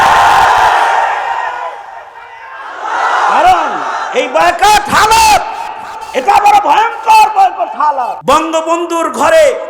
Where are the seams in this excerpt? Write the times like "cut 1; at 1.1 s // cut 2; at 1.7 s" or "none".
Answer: cut 1; at 8.2 s

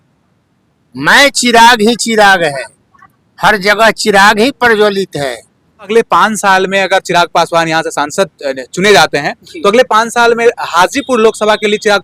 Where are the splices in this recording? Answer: cut 1; at 5.7 s

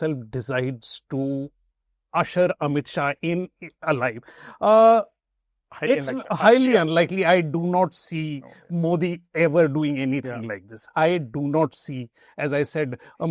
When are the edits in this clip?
none

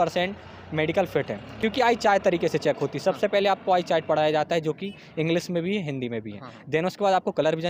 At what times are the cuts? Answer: none

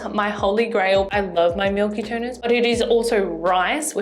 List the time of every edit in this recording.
cut 1; at 1.1 s // cut 2; at 2.4 s

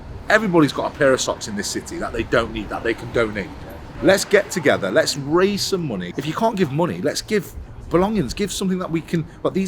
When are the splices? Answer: none

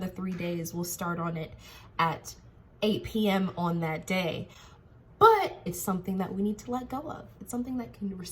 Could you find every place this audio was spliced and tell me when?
cut 1; at 5.7 s

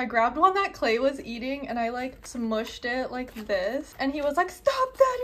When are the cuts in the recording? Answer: cut 1; at 2.2 s // cut 2; at 3.9 s

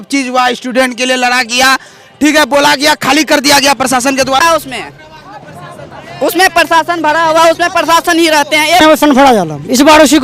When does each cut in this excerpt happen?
cut 1; at 4.4 s // cut 2; at 8.8 s

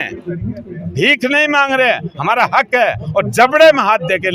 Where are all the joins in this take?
none

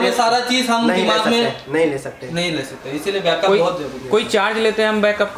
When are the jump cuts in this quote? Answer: none

